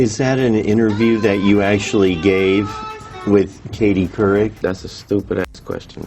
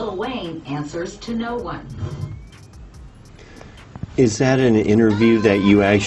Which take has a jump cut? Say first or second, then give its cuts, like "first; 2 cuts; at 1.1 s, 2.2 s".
first; 1 cut; at 4.6 s